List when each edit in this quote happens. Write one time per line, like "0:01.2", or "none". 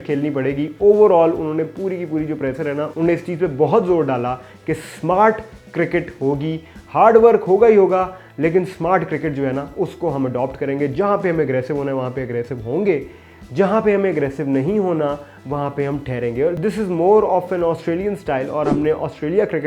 none